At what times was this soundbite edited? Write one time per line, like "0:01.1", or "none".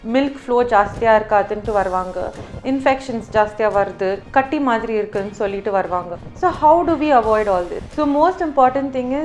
0:04.2
0:06.2
0:07.8

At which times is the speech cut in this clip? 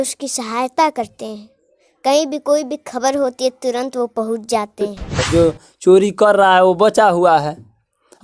0:05.2

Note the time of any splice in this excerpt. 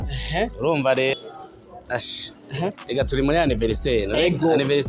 0:01.1

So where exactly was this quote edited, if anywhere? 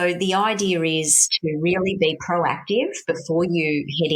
none

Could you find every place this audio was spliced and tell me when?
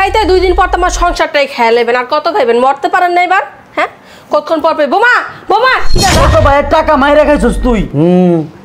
0:06.1

